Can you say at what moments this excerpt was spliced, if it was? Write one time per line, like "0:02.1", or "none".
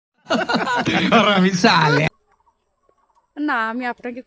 0:02.2